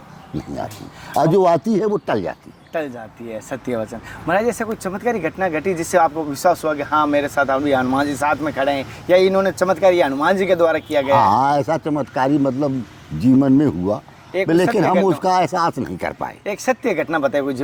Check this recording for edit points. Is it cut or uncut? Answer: uncut